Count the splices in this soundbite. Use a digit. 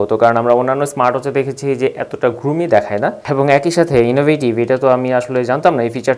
1